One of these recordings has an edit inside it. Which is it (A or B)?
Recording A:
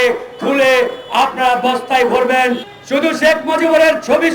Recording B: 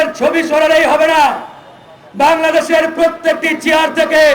A